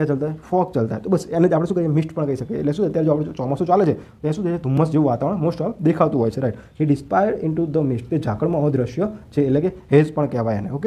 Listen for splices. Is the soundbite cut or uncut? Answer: uncut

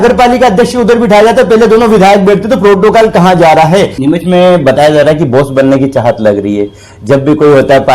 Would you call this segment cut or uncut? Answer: cut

